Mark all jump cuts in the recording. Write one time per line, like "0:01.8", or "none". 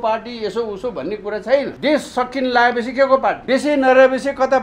0:01.7
0:03.4